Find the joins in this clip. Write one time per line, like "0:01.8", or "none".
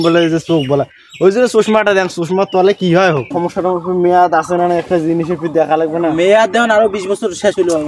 0:03.3